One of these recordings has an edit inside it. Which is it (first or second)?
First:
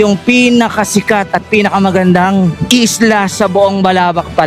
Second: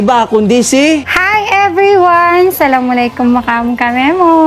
first